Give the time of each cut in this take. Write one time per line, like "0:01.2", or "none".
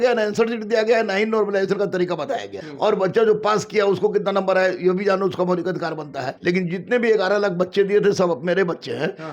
0:02.6
0:06.2